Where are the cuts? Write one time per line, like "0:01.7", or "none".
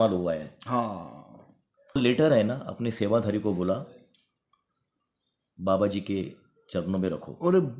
0:02.0